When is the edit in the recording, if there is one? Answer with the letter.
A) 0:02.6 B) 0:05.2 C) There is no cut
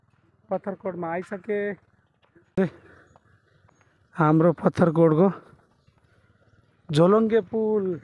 A